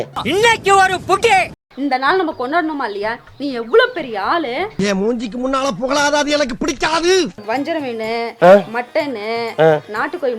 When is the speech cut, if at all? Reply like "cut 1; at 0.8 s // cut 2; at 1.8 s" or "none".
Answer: cut 1; at 1.6 s // cut 2; at 7.5 s

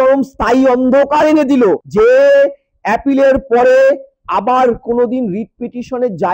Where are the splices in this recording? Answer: cut 1; at 1.8 s

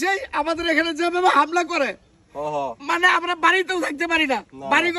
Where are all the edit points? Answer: none

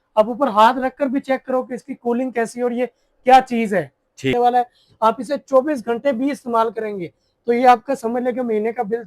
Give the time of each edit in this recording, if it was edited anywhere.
cut 1; at 4.3 s

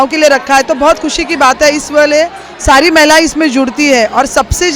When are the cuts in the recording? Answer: none

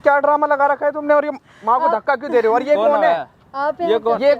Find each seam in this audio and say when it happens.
none

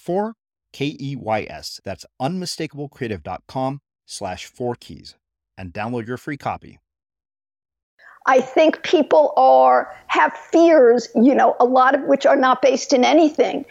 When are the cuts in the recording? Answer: cut 1; at 8.0 s

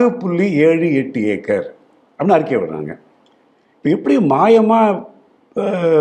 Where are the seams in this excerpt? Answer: none

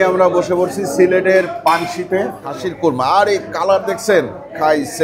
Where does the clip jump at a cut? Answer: cut 1; at 2.7 s

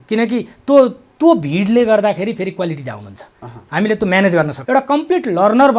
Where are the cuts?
cut 1; at 4.6 s

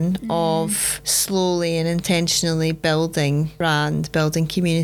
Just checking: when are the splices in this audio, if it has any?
none

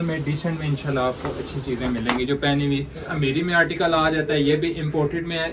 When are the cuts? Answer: cut 1; at 3.1 s

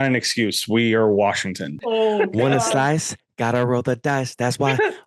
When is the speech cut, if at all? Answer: cut 1; at 1.7 s

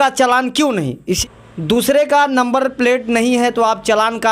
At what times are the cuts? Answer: cut 1; at 1.2 s

